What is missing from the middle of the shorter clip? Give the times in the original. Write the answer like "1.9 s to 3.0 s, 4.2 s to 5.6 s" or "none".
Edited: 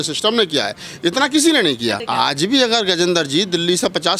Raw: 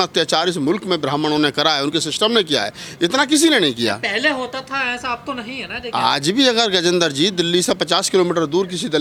4.0 s to 5.9 s